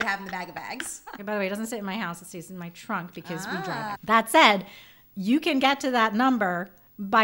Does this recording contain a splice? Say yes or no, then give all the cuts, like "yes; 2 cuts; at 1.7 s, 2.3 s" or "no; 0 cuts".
yes; 2 cuts; at 1.2 s, 3.9 s